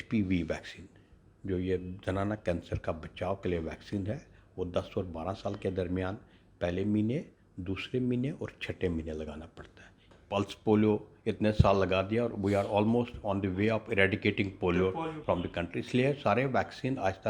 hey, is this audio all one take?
no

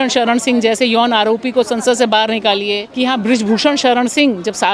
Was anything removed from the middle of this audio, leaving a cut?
yes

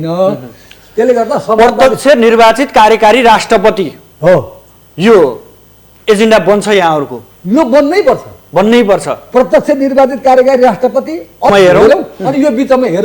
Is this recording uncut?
no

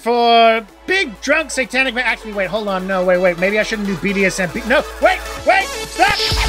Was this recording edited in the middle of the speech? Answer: no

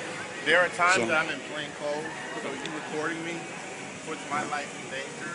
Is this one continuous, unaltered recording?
no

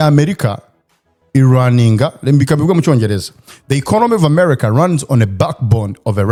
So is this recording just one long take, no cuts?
yes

